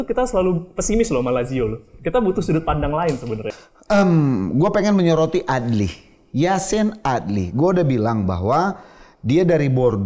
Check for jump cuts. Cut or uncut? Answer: cut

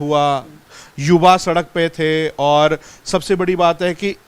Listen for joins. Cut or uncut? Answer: uncut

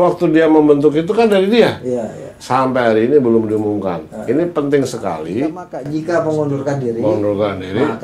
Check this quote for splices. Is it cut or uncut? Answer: cut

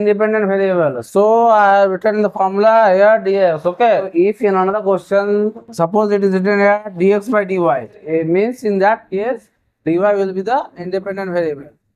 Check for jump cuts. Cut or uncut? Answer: uncut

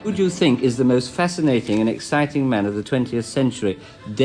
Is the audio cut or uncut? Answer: uncut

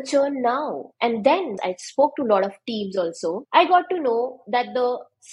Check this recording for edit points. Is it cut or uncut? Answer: cut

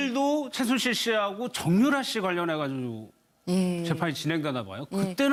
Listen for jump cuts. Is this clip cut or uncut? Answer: uncut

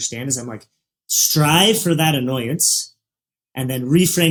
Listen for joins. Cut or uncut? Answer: uncut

